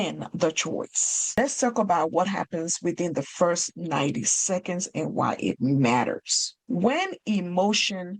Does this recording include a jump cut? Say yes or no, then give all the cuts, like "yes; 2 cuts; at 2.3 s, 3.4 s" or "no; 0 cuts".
no; 0 cuts